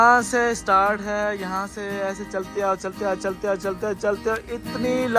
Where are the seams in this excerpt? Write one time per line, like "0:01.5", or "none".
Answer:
none